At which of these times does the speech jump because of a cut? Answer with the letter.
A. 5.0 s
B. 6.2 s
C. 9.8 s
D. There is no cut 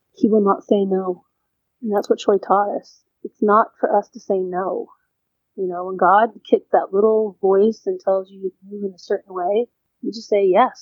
C